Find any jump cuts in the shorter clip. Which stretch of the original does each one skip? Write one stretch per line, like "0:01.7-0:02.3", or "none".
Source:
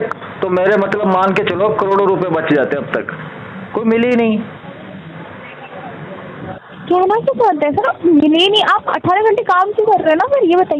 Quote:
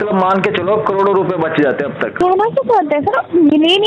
0:03.0-0:06.8